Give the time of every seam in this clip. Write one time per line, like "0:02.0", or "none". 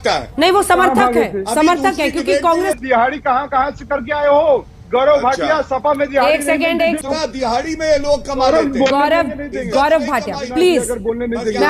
0:02.8
0:04.8
0:07.0